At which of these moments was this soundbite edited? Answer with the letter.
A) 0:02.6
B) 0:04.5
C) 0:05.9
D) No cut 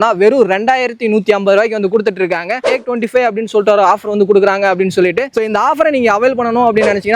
A